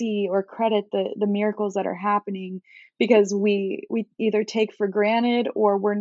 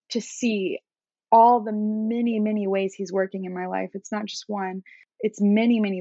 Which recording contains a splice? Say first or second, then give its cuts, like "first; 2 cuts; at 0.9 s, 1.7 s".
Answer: second; 1 cut; at 5.0 s